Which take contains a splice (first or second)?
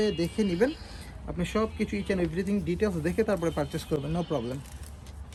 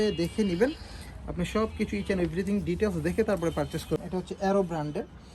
second